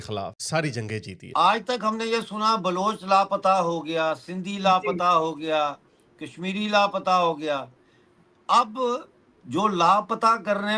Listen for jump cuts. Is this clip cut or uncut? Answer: cut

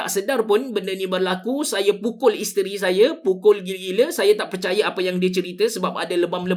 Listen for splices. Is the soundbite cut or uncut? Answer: uncut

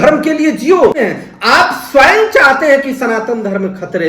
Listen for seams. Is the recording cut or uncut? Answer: cut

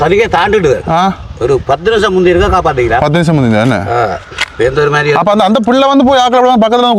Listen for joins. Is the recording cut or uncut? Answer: uncut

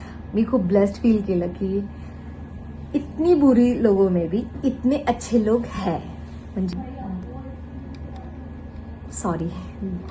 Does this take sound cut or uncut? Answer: cut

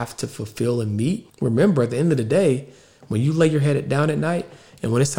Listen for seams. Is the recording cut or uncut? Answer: cut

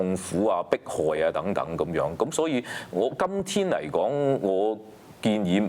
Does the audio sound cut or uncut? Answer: uncut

